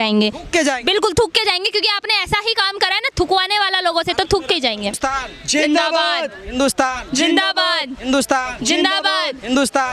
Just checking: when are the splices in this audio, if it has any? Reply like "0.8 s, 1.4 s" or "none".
4.9 s